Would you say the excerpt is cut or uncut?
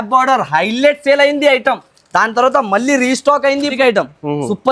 cut